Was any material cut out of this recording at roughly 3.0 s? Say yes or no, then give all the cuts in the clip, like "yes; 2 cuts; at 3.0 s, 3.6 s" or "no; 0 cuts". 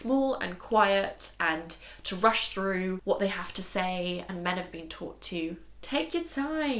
yes; 1 cut; at 3.0 s